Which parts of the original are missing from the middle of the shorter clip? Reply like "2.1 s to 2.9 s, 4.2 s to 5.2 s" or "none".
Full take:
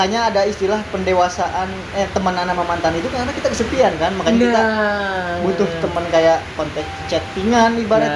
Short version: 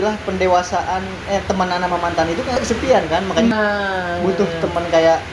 3.2 s to 3.4 s, 4.4 s to 4.7 s